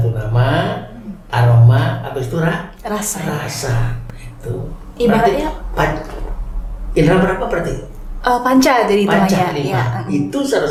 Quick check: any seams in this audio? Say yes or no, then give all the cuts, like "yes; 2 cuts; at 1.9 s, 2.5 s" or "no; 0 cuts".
no; 0 cuts